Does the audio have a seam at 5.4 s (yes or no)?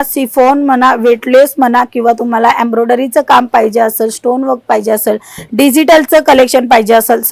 no